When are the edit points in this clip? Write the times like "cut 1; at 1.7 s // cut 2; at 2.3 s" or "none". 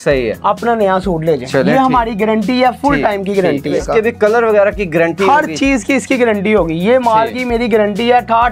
cut 1; at 3.7 s